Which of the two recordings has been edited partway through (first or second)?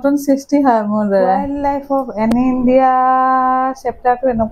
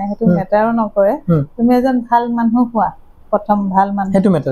first